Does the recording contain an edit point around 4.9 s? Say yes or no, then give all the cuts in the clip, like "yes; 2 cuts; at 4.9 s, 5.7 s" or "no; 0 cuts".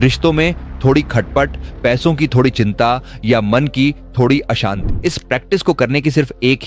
yes; 1 cut; at 4.9 s